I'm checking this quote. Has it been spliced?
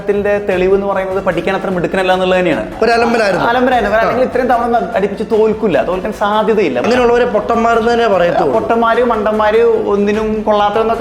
yes; 1 cut; at 6.8 s

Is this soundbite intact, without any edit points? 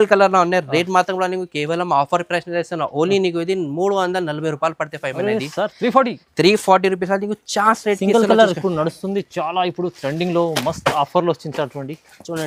yes; 0 cuts

